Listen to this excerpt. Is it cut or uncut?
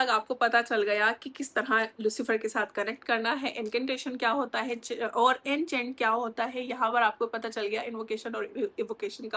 uncut